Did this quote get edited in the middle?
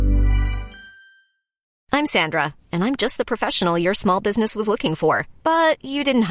yes; 1 cut; at 1.8 s

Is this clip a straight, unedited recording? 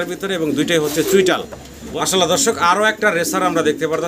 no; 1 cut; at 1.8 s

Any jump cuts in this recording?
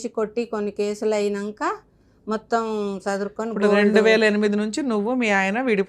no; 0 cuts

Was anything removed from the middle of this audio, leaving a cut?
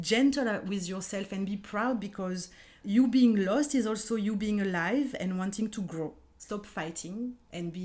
yes; 2 cuts; at 2.8 s, 6.3 s

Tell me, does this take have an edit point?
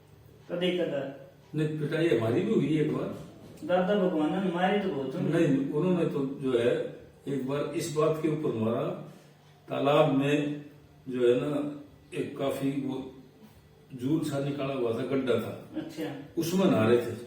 no; 0 cuts

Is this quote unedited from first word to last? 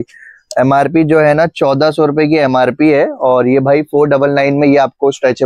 yes; 0 cuts

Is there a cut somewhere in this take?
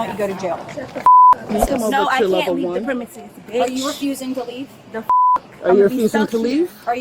yes; 1 cut; at 1.5 s

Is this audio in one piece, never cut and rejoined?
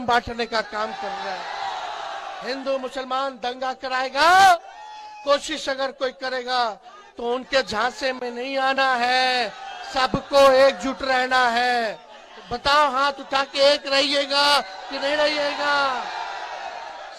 yes; 0 cuts

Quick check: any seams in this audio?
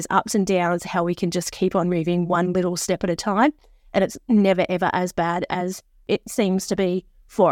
no; 0 cuts

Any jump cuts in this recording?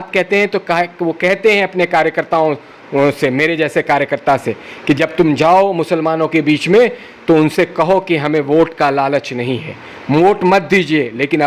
no; 0 cuts

